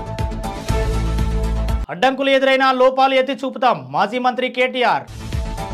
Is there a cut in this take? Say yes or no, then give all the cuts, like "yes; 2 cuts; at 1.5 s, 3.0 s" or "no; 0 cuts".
no; 0 cuts